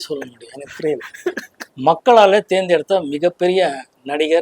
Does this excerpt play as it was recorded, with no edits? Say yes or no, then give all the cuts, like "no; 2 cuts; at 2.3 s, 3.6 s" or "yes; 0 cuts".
no; 1 cut; at 1.6 s